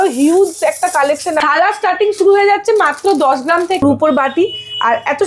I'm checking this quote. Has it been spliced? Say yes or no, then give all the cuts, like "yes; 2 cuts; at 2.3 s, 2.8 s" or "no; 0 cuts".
yes; 2 cuts; at 1.4 s, 3.8 s